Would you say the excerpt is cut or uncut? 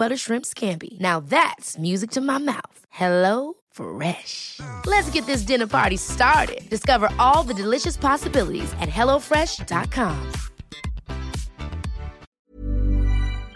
cut